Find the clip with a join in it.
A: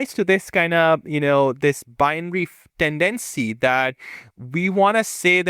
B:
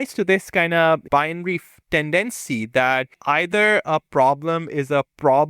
B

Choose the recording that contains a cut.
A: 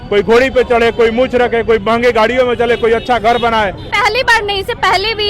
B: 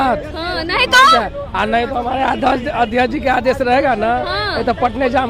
A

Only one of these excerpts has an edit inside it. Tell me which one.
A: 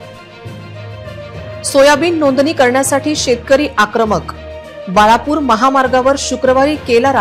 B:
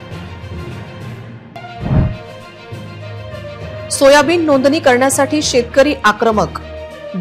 B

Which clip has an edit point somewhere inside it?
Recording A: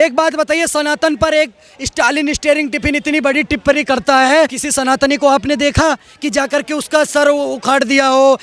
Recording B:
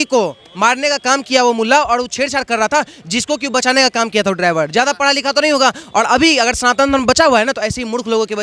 A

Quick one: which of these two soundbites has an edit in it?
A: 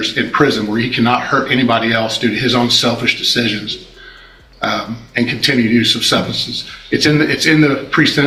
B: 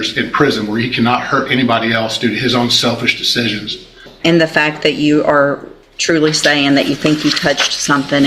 B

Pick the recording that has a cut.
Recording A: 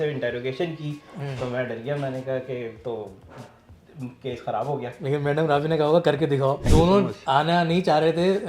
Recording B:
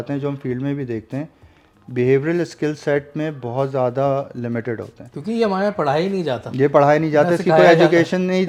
A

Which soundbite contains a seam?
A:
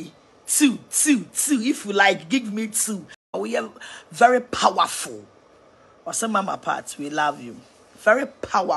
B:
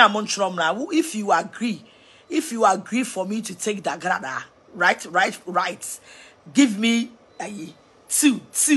A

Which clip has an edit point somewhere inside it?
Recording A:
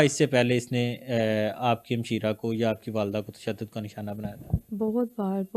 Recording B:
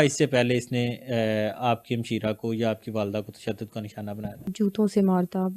B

